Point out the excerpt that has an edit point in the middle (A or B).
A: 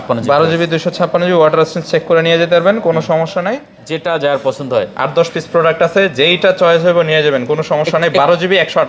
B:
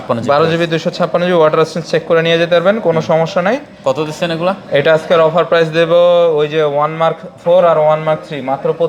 A